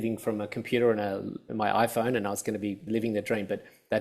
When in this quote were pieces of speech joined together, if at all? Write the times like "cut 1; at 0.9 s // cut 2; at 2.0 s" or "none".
cut 1; at 1.4 s // cut 2; at 2.8 s